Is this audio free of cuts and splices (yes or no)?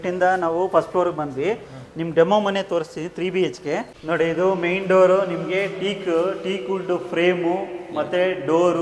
yes